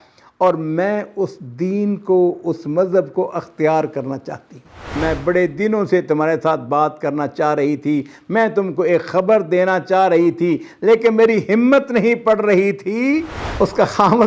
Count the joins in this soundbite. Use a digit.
2